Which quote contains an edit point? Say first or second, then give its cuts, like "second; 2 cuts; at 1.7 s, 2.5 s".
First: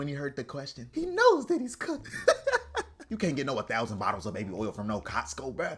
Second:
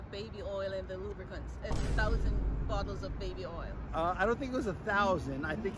first; 2 cuts; at 2.1 s, 3.0 s